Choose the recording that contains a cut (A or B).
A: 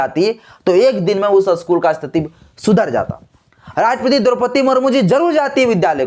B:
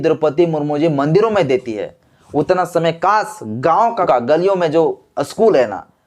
B